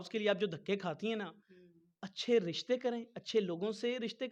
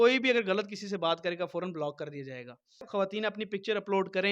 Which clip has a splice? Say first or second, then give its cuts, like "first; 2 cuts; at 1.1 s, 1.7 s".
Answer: second; 1 cut; at 2.9 s